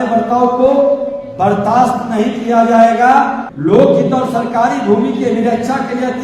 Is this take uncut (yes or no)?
no